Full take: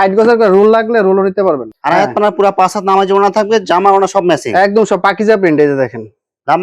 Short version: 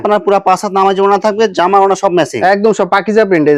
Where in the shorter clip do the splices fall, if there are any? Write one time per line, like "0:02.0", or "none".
none